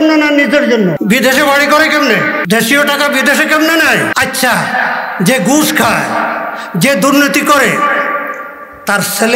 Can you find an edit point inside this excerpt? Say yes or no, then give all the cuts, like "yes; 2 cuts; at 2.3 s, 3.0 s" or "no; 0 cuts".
yes; 3 cuts; at 1.0 s, 2.4 s, 4.1 s